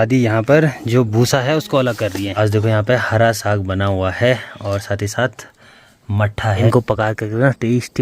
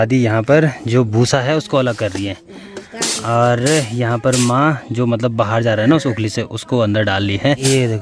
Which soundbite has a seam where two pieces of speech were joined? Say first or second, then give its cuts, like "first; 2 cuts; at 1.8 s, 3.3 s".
first; 2 cuts; at 2.3 s, 6.6 s